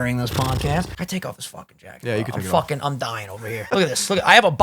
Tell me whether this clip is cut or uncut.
cut